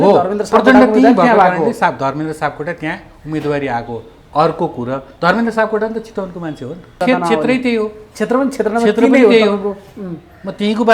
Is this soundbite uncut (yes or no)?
no